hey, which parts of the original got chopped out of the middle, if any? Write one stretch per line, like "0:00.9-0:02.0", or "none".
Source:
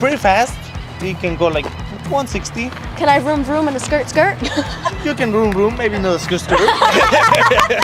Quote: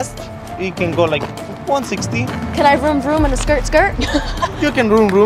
none